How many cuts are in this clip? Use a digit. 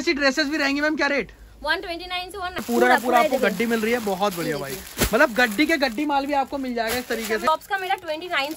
2